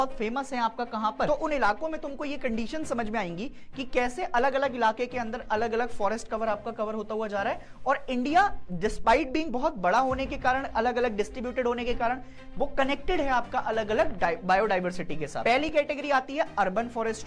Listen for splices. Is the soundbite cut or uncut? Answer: cut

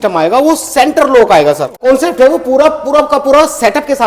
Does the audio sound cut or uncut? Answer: cut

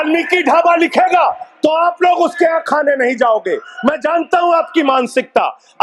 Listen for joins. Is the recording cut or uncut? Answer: uncut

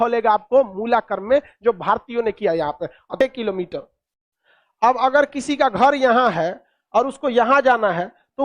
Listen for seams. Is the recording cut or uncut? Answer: cut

